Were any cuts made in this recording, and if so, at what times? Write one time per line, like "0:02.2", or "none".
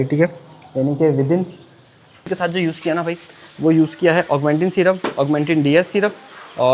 0:02.3